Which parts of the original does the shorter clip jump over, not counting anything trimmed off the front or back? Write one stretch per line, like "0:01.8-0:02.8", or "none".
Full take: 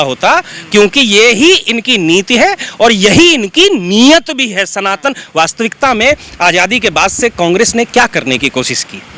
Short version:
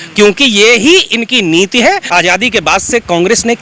0:02.6-0:06.3